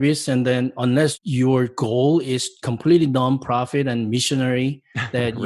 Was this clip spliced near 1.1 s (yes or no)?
yes